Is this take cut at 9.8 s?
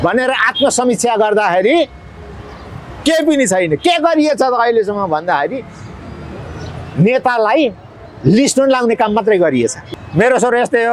yes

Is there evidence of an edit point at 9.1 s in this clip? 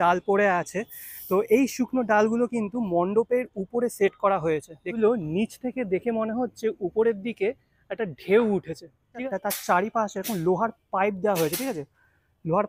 yes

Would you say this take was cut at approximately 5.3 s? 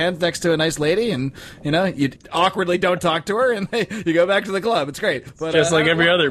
yes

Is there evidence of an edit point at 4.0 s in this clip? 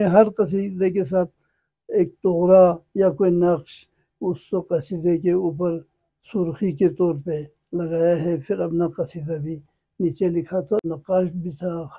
no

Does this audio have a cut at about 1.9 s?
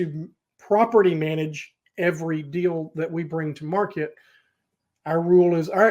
no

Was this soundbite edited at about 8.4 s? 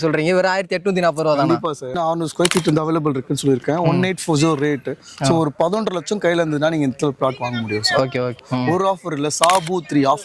yes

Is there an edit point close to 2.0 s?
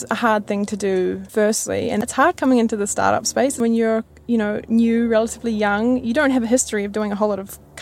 yes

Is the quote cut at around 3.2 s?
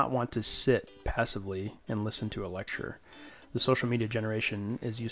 no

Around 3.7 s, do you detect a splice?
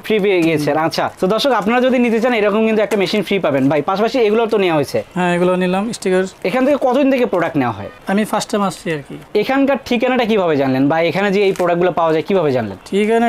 no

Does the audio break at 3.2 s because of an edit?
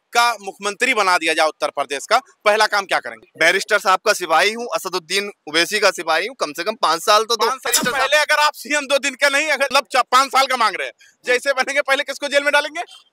yes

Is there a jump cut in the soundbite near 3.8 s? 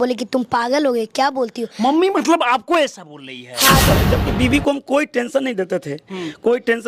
yes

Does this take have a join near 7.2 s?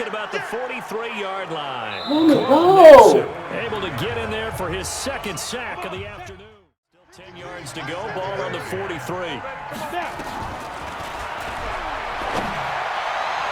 yes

